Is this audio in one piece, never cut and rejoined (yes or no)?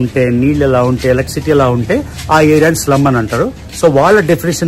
yes